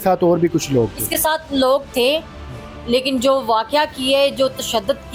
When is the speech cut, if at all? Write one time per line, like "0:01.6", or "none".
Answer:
none